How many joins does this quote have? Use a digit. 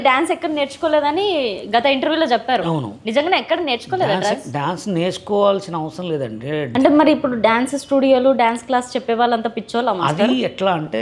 1